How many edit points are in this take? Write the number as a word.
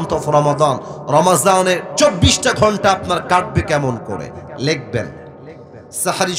one